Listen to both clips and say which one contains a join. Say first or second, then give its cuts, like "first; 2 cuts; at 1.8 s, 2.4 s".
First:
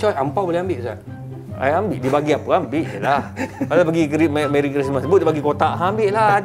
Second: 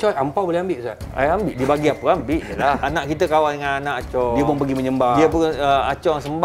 second; 2 cuts; at 1.0 s, 2.9 s